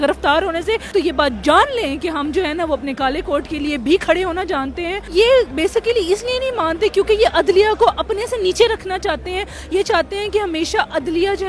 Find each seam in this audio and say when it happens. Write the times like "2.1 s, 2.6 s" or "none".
0.9 s, 4.9 s